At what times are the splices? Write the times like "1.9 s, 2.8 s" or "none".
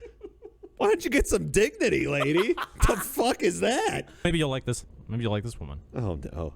4.2 s